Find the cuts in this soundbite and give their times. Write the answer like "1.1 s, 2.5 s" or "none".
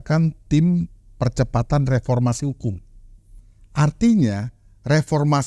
none

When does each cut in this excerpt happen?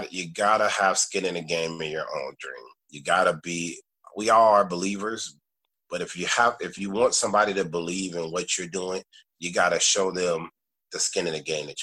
4.0 s

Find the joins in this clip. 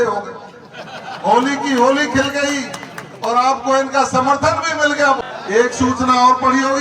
5.2 s

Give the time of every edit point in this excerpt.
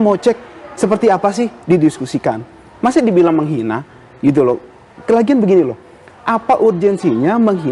none

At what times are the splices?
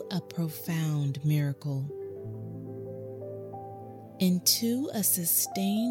1.9 s, 4.1 s

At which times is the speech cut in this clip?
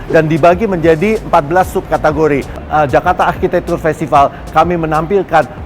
2.6 s

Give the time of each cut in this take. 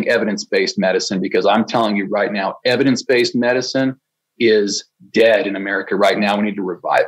none

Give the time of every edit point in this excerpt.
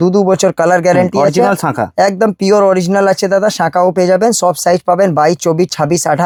none

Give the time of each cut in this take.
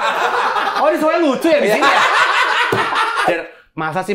3.2 s

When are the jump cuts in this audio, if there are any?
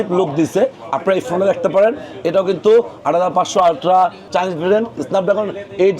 4.2 s

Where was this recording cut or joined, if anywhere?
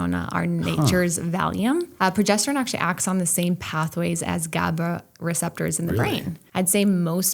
1.9 s, 6.4 s

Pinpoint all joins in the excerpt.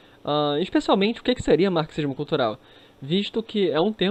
none

